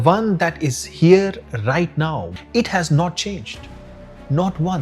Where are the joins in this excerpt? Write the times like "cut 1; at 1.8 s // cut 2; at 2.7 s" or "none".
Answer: cut 1; at 2.3 s

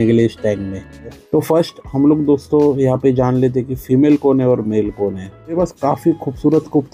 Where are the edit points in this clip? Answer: cut 1; at 1.2 s // cut 2; at 5.6 s

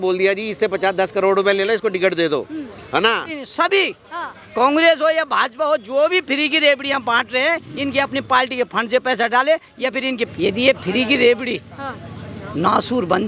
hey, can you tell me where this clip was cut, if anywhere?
cut 1; at 3.3 s // cut 2; at 10.2 s

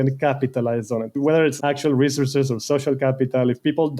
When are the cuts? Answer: cut 1; at 1.2 s

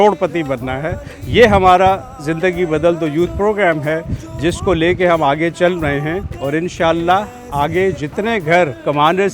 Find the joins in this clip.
none

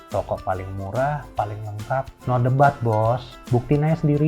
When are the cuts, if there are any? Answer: cut 1; at 2.2 s // cut 2; at 3.3 s

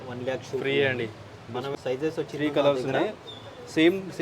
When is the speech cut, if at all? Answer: cut 1; at 1.7 s

